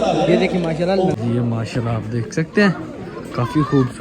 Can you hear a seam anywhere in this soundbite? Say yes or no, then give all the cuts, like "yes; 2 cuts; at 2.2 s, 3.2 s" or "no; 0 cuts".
yes; 1 cut; at 1.1 s